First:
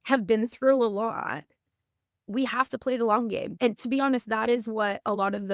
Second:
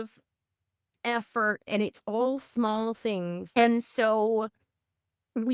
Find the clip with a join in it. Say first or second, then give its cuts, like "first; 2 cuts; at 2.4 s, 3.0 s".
second; 2 cuts; at 1.7 s, 3.4 s